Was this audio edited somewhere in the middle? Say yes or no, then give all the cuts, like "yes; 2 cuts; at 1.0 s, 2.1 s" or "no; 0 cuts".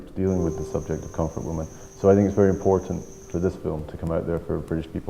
yes; 1 cut; at 1.8 s